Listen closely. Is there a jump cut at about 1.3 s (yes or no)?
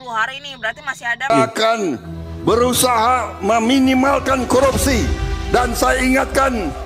yes